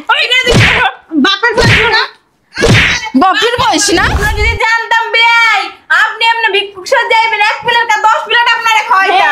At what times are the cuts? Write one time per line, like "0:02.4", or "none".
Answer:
0:04.2